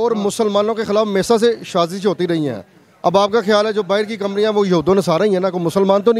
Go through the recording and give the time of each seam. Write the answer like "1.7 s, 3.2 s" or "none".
none